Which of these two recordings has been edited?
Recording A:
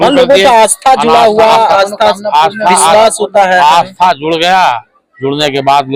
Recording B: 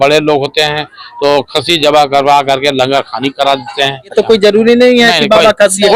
B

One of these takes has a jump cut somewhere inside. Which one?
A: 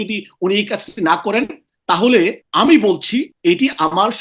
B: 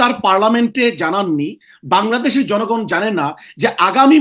A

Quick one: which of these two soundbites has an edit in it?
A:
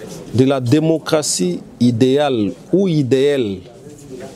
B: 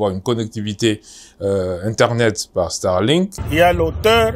B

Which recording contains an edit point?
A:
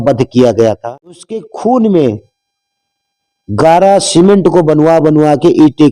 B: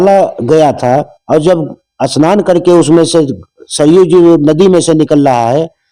A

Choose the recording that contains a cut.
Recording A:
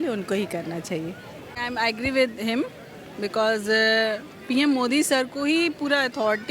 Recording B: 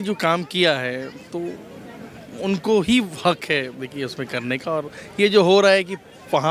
A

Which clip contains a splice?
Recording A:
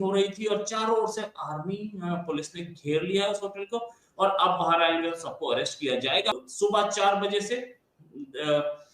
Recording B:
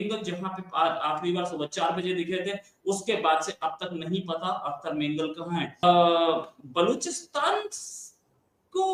A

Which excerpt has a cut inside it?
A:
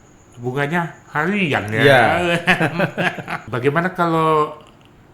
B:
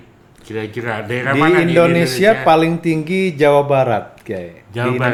A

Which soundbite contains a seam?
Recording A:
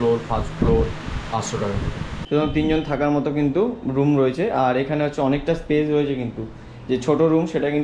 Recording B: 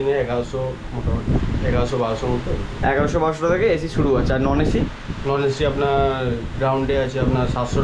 A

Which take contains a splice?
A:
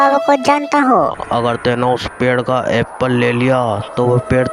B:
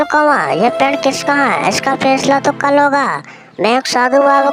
A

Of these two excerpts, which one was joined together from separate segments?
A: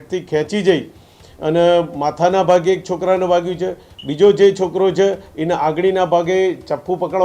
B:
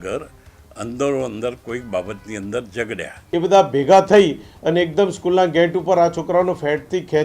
B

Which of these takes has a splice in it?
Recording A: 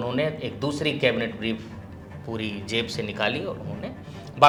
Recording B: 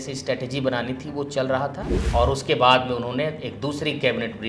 B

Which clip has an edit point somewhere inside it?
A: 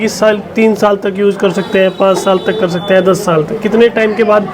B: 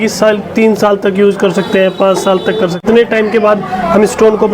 B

